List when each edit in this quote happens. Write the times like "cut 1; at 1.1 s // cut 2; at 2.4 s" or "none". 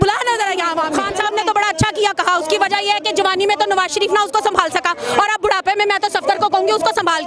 cut 1; at 1.0 s